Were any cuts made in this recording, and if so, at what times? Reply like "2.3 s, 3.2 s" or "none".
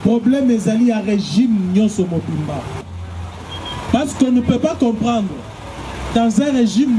2.9 s

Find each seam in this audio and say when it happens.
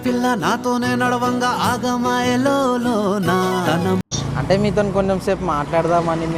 4.2 s

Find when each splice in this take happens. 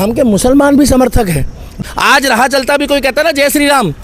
1.8 s

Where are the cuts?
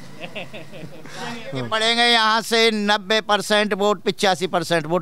1.6 s

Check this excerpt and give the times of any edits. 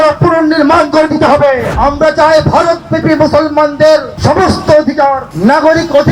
1.7 s, 4.1 s, 5.3 s

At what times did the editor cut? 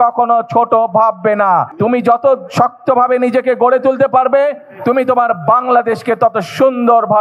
1.7 s

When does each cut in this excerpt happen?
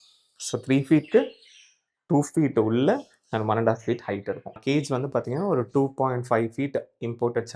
4.6 s

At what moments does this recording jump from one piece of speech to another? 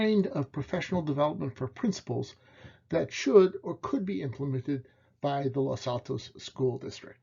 6.2 s

